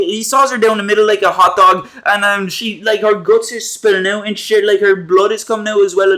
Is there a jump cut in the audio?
no; 0 cuts

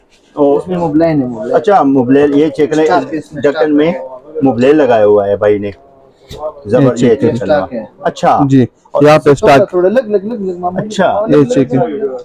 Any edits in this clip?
no; 0 cuts

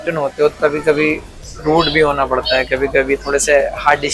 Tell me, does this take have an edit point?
no; 0 cuts

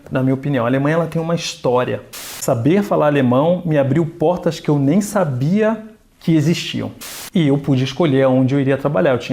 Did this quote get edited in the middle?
yes; 2 cuts; at 2.2 s, 7.0 s

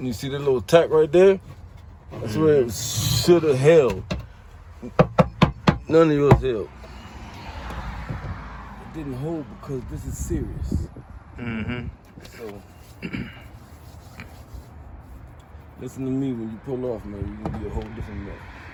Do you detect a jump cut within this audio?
no; 0 cuts

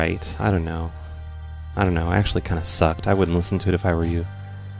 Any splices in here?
no; 0 cuts

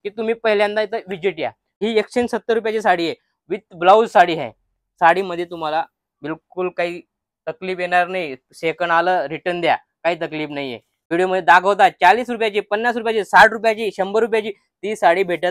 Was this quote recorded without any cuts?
no; 2 cuts; at 1.8 s, 10.9 s

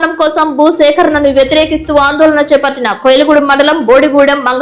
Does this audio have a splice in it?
no; 0 cuts

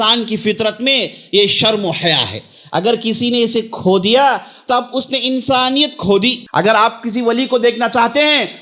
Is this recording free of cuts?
no; 1 cut; at 6.4 s

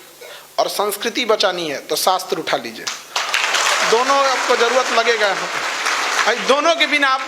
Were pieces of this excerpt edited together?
no; 0 cuts

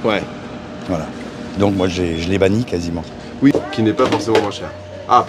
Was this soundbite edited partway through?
yes; 1 cut; at 3.5 s

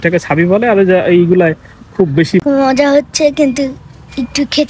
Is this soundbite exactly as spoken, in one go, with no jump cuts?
no; 1 cut; at 2.4 s

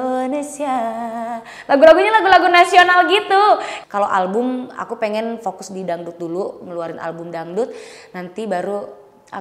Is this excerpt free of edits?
no; 1 cut; at 3.7 s

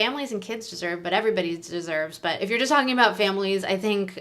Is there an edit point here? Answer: yes; 1 cut; at 2.4 s

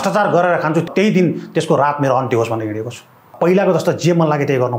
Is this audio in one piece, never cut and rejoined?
no; 2 cuts; at 0.8 s, 3.4 s

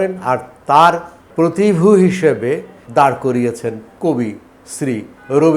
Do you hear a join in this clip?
yes; 3 cuts; at 1.2 s, 2.7 s, 3.9 s

